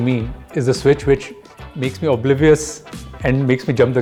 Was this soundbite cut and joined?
no; 0 cuts

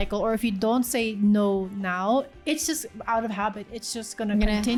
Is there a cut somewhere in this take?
no; 0 cuts

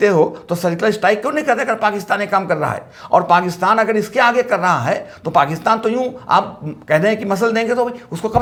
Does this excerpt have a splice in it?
no; 0 cuts

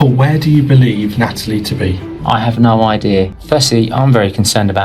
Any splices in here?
yes; 1 cut; at 3.4 s

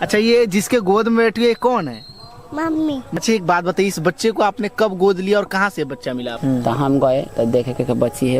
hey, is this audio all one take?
no; 2 cuts; at 3.0 s, 6.3 s

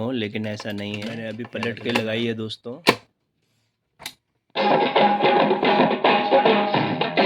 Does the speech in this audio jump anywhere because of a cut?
yes; 1 cut; at 1.1 s

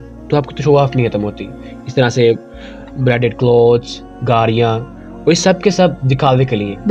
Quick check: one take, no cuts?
yes; 0 cuts

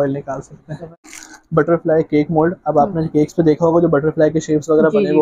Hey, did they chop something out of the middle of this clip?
yes; 1 cut; at 0.9 s

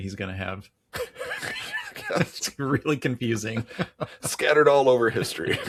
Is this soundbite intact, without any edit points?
yes; 0 cuts

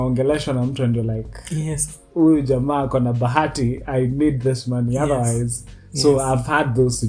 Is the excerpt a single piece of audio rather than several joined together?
yes; 0 cuts

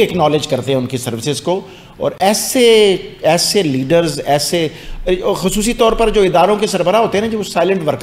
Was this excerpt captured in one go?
yes; 0 cuts

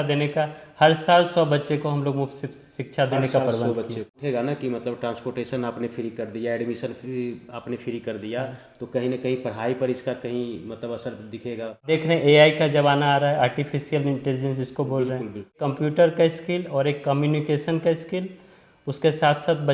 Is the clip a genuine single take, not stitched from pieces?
no; 3 cuts; at 4.2 s, 11.8 s, 15.6 s

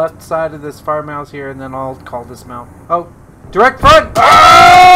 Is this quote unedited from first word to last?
no; 2 cuts; at 2.7 s, 4.1 s

